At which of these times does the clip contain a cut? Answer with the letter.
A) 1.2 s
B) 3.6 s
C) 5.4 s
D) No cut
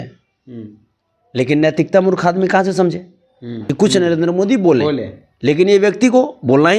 B